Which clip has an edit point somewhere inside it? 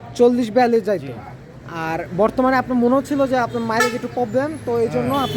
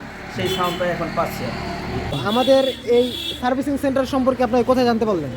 second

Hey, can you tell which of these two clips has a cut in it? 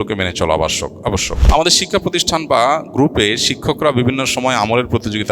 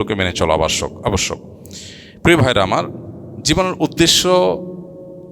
first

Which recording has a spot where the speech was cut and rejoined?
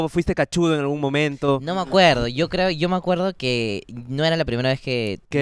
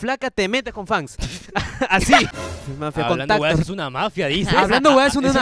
second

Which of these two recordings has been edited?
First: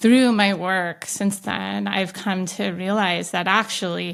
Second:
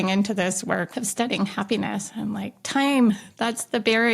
second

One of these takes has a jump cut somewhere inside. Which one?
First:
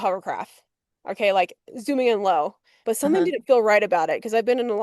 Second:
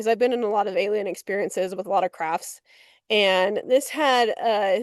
first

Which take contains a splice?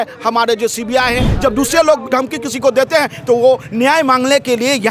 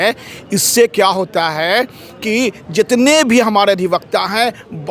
first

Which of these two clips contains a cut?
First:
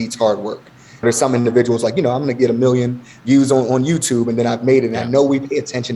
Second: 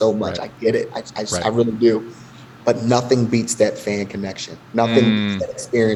first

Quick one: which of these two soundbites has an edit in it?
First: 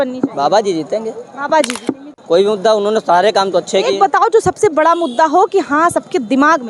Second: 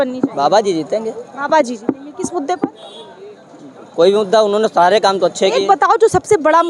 first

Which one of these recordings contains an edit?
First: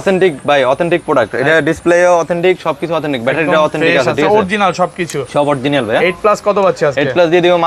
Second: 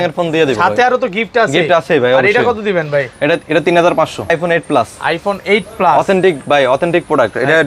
second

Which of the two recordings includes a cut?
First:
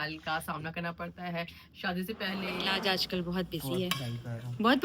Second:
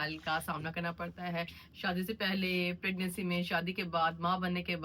first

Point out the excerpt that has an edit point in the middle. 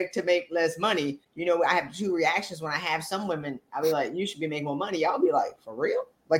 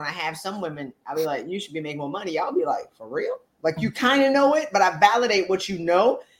first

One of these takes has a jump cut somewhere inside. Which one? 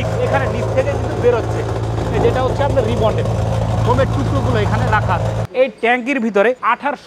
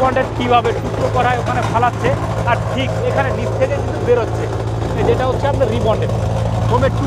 first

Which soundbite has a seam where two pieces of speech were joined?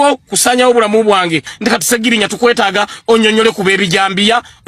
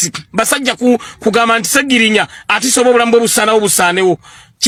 first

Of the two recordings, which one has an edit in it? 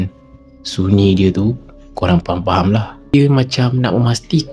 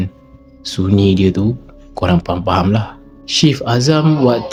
first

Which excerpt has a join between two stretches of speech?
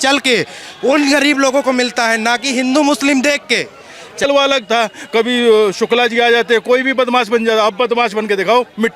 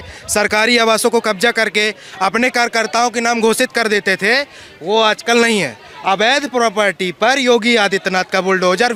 first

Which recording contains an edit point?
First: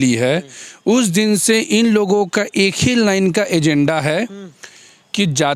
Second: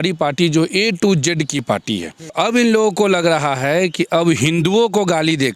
second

